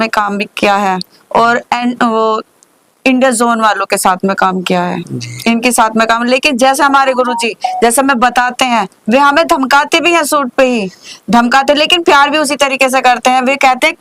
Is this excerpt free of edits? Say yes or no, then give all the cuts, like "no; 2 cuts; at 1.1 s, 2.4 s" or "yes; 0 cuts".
yes; 0 cuts